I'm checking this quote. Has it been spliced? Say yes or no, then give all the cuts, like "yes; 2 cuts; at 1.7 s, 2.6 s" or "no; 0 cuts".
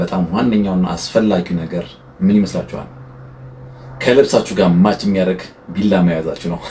no; 0 cuts